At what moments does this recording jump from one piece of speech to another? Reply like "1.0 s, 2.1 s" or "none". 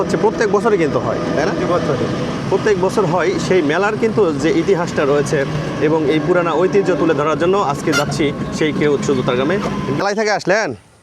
10.0 s